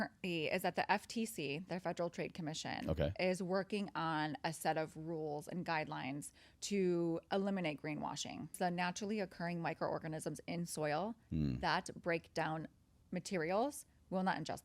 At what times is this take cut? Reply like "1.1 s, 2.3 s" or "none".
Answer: 8.6 s